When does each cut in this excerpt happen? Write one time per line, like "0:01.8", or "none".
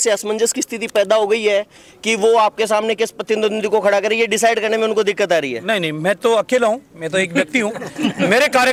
none

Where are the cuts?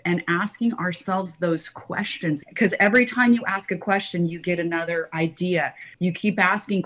0:02.4
0:05.8

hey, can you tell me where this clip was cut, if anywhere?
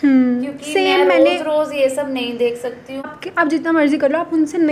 0:03.1

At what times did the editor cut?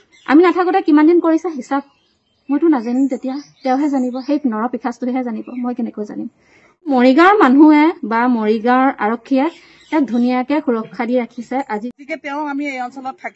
0:06.9
0:11.9

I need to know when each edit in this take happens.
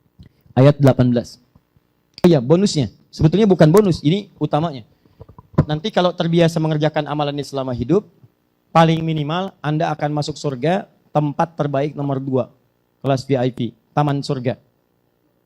0:02.2

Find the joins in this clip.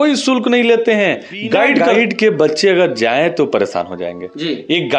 0:01.9

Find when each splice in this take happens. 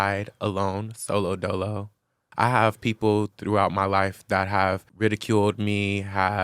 0:02.2
0:03.3
0:04.9

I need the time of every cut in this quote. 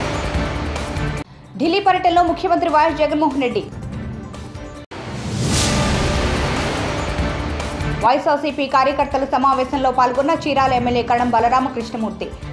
0:01.0

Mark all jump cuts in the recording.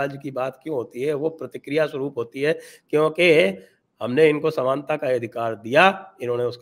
none

